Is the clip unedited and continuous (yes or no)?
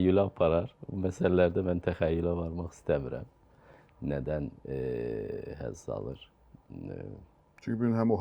yes